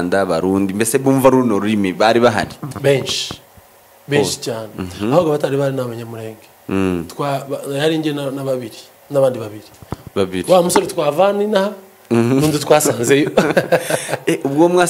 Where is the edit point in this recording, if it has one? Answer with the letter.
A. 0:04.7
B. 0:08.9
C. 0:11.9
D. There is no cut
D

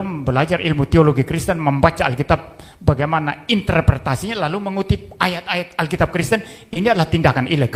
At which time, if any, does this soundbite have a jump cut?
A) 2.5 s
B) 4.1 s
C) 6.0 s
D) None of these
D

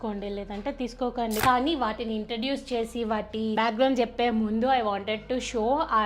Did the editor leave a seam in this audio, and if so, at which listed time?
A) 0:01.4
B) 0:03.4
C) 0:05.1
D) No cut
A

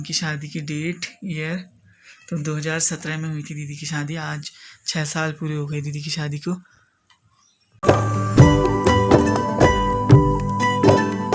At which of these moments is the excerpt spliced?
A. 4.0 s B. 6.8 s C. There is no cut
C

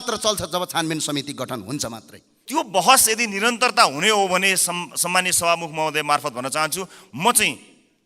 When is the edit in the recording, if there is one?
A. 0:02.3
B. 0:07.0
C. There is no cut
A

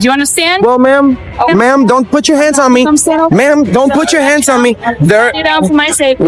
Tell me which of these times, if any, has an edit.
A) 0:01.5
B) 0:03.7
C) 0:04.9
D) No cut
A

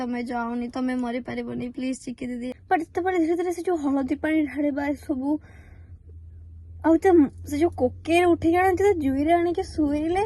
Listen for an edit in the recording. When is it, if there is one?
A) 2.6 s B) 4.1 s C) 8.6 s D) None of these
A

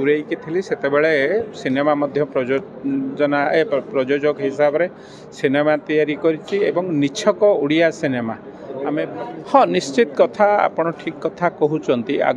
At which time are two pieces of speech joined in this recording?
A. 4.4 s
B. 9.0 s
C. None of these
B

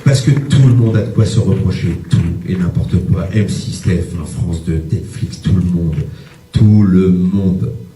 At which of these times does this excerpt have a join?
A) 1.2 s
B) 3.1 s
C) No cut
B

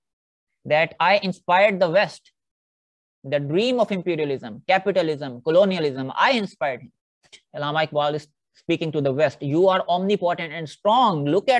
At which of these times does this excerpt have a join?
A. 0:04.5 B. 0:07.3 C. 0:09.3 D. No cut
B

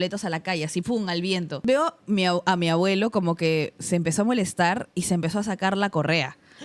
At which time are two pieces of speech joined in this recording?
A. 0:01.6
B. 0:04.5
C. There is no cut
A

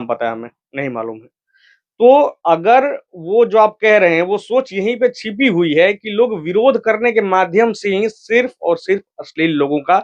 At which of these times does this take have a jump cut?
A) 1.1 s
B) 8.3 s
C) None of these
C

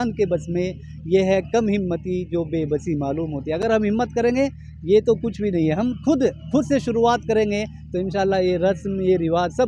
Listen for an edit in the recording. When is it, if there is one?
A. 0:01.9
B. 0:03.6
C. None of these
C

